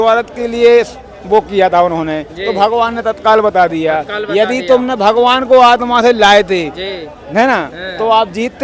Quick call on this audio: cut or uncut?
uncut